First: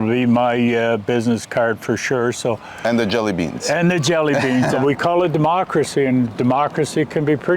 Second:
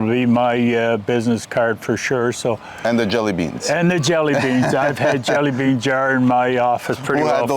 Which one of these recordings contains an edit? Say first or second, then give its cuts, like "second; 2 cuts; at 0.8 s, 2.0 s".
first; 1 cut; at 4.8 s